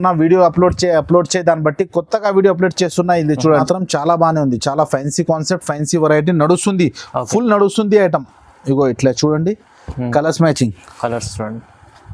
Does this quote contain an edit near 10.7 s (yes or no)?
no